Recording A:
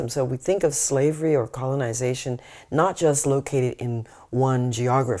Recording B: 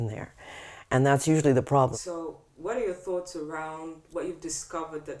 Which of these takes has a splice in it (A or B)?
B